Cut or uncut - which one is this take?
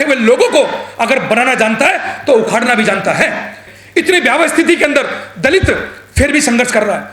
cut